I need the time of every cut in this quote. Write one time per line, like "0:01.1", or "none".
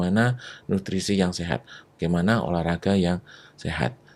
none